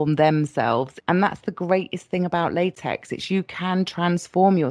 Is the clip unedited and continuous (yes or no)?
no